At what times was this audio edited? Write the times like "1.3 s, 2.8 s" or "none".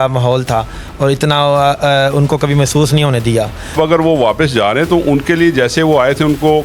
3.8 s